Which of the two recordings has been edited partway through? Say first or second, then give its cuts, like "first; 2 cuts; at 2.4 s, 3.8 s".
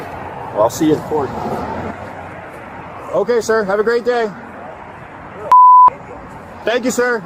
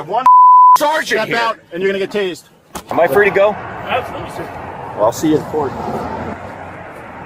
second; 1 cut; at 2.9 s